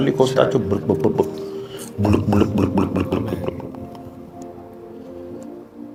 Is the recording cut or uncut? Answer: uncut